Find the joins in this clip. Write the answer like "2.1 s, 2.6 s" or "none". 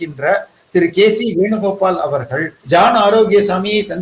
2.5 s